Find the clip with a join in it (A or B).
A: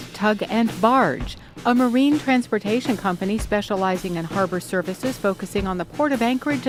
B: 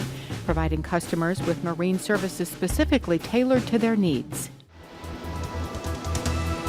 B